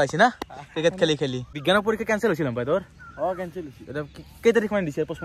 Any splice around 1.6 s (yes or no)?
yes